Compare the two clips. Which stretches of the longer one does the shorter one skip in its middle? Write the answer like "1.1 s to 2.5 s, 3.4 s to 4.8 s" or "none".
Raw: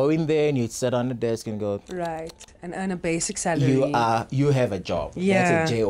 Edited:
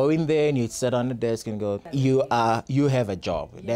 1.9 s to 3.6 s

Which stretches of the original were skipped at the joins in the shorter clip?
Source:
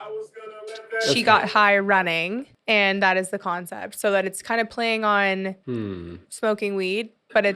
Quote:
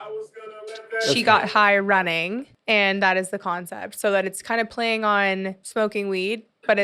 5.6 s to 6.3 s

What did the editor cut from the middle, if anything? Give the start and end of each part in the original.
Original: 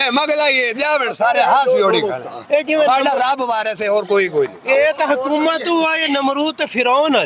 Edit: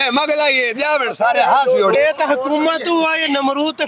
1.9 s to 4.8 s

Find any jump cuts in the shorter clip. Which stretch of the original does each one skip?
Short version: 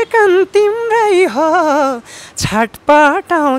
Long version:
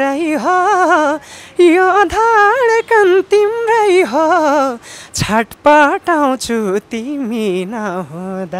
none

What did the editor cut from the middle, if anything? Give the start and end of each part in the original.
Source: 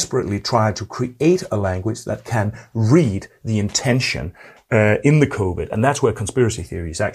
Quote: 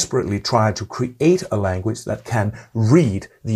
none

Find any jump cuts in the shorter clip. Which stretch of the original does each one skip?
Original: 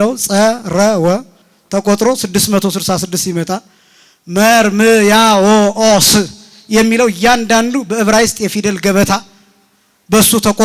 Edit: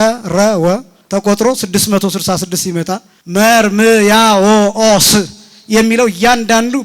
1.3 s to 1.5 s, 3.7 s to 4.1 s

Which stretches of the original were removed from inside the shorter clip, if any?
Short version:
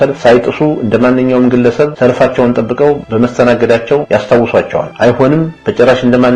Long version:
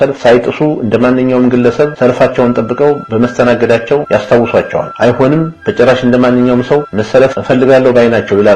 none

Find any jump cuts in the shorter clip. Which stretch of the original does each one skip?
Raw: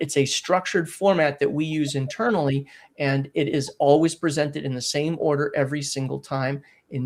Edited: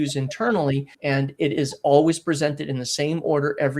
2.7 s to 2.9 s

